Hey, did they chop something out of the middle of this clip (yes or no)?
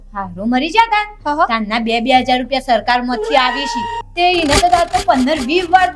yes